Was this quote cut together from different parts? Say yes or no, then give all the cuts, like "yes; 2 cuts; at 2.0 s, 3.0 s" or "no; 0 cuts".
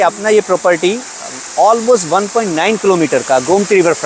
no; 0 cuts